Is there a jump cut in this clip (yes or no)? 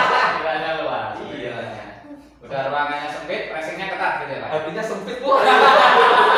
no